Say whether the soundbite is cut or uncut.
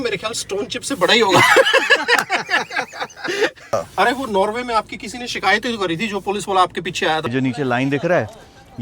cut